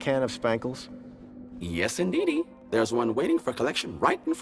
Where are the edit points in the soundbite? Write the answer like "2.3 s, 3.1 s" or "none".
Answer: none